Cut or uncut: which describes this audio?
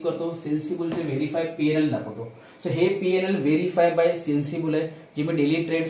uncut